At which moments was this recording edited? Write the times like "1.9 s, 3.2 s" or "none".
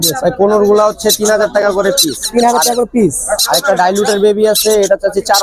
none

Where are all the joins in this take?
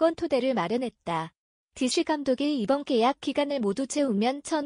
1.0 s

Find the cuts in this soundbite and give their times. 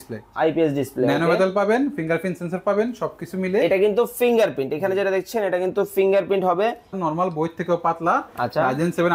7.0 s

